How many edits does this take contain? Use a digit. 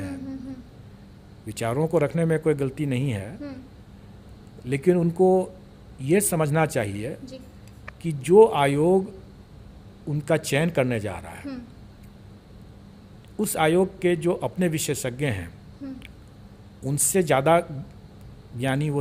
0